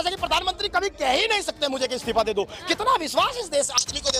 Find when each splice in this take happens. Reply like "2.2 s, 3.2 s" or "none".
none